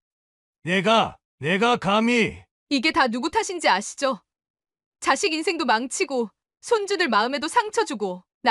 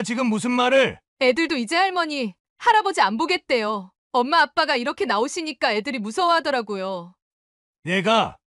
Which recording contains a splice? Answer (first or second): second